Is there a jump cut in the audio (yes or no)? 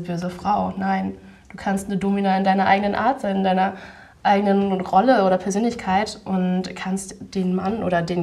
no